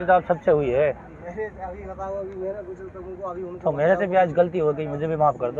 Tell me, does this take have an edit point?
no; 0 cuts

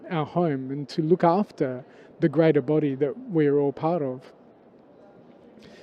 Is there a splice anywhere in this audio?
no; 0 cuts

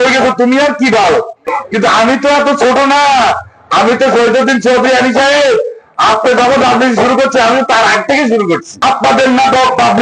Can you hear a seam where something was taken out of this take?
yes; 2 cuts; at 1.4 s, 8.7 s

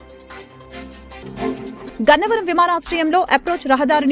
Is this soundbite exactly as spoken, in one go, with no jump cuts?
yes; 0 cuts

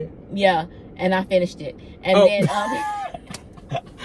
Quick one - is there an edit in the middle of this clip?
no; 0 cuts

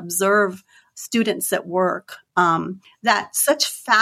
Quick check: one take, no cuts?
no; 1 cut; at 2.8 s

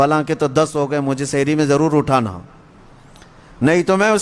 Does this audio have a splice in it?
no; 0 cuts

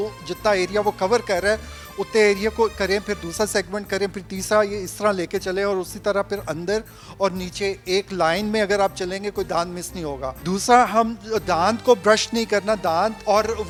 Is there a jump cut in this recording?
no; 0 cuts

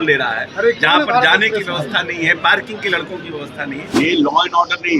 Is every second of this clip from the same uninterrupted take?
no; 1 cut; at 3.9 s

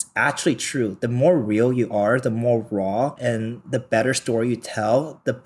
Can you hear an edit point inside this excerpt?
yes; 1 cut; at 3.2 s

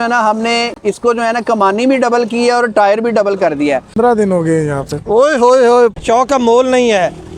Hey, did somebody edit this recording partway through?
yes; 2 cuts; at 3.9 s, 5.9 s

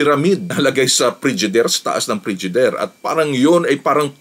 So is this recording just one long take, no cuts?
yes; 0 cuts

